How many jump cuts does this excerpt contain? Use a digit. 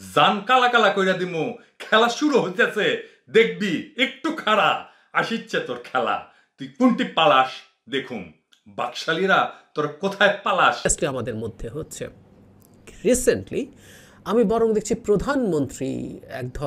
1